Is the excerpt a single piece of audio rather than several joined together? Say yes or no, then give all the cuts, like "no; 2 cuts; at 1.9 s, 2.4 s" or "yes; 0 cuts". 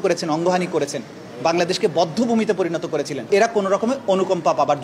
no; 1 cut; at 3.3 s